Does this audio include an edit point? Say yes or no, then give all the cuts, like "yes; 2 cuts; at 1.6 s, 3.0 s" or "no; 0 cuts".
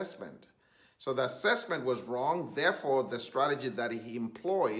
no; 0 cuts